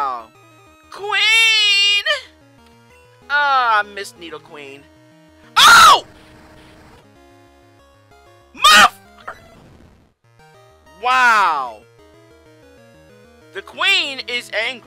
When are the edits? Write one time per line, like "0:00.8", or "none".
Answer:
0:09.3